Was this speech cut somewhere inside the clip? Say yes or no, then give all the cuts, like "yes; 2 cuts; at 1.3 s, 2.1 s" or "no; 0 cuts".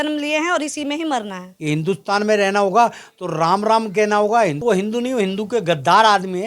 yes; 2 cuts; at 1.5 s, 4.6 s